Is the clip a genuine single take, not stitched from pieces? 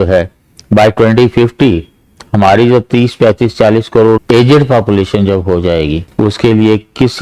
no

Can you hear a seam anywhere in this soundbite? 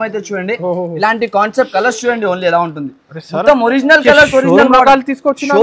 no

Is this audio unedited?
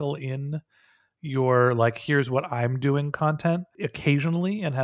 no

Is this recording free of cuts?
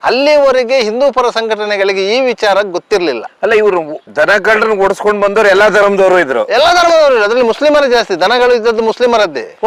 yes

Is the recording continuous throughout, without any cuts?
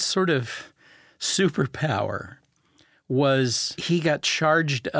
yes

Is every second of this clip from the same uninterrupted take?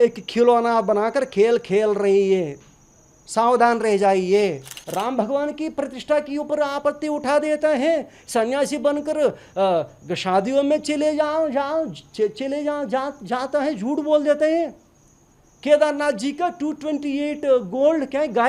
no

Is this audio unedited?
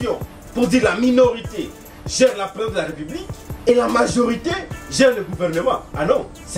no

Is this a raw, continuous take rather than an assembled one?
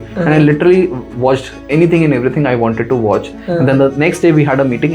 no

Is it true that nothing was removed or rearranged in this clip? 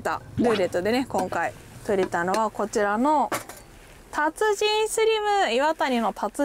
yes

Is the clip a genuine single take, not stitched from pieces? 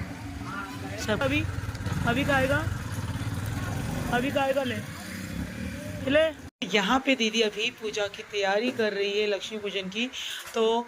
yes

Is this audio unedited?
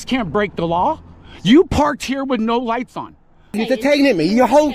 no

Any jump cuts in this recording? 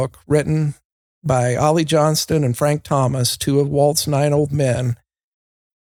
no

